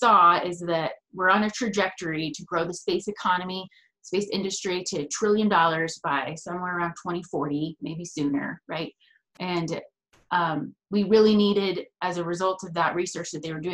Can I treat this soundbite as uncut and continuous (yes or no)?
yes